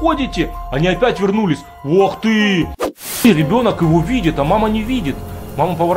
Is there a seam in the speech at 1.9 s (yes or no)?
no